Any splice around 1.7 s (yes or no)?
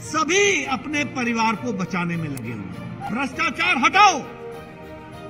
no